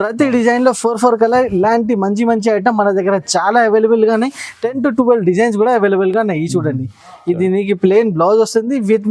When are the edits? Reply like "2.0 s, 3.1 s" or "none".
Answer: none